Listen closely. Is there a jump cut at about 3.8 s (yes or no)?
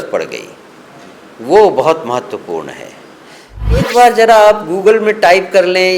yes